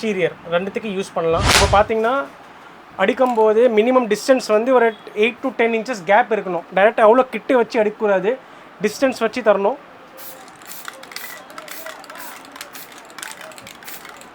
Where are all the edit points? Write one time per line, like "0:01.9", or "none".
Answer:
0:01.5